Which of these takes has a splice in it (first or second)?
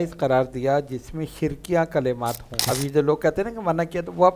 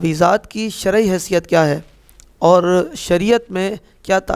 first